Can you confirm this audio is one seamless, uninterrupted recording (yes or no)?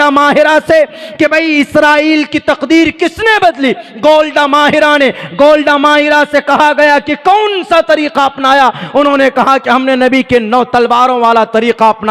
yes